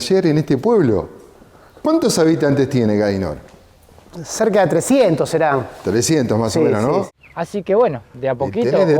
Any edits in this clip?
yes; 1 cut; at 7.1 s

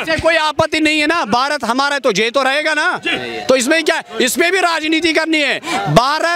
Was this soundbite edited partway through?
no; 0 cuts

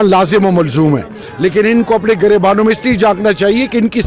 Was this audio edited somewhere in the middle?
yes; 1 cut; at 1.2 s

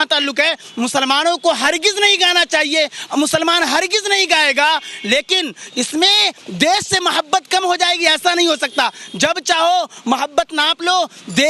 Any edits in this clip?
no; 0 cuts

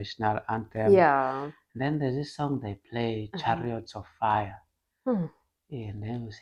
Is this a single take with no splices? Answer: yes; 0 cuts

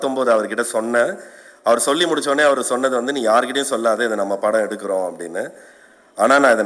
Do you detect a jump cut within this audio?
no; 0 cuts

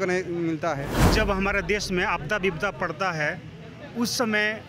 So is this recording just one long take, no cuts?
no; 1 cut; at 1.1 s

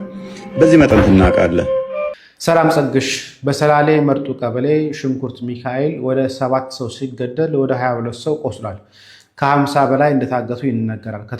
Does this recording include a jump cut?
yes; 1 cut; at 1.8 s

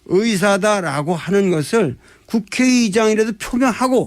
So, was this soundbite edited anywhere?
yes; 1 cut; at 2.4 s

